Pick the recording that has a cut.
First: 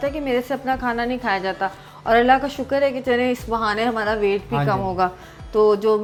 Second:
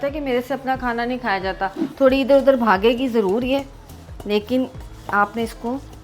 second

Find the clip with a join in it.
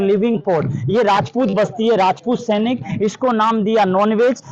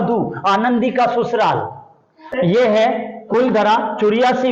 second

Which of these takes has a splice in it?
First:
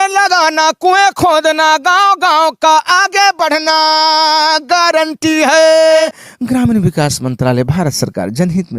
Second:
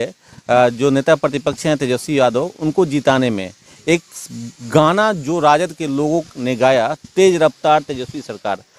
first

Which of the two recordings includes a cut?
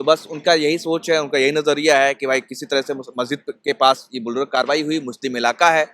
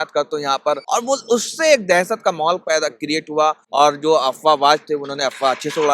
second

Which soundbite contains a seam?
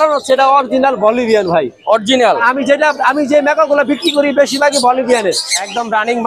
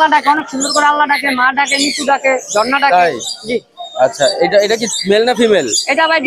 first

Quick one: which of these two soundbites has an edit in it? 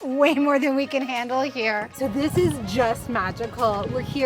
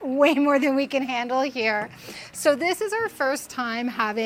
first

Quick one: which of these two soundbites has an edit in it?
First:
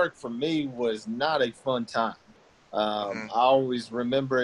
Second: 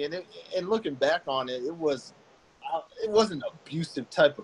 second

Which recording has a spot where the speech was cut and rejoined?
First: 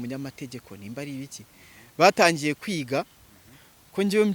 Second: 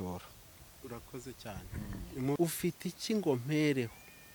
second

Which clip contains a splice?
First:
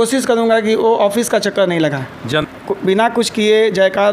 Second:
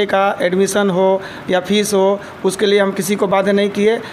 first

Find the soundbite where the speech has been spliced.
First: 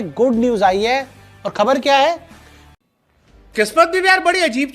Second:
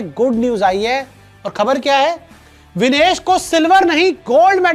first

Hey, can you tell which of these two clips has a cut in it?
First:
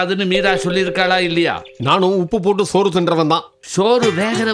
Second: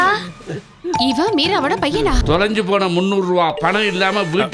second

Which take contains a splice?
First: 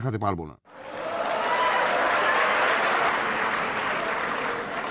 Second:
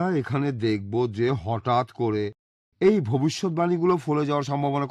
first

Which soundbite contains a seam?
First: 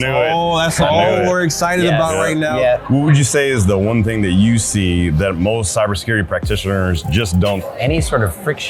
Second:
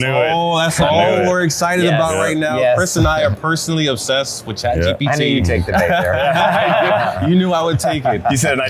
first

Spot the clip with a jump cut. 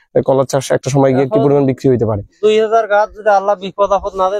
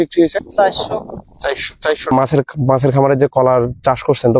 second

